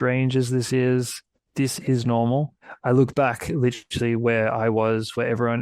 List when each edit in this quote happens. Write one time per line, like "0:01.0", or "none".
0:02.6